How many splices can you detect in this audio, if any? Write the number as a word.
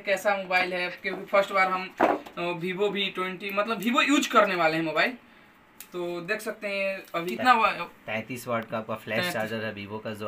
one